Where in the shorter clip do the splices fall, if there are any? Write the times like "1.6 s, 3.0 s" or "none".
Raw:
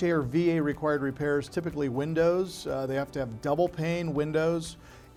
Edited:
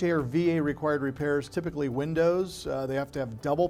none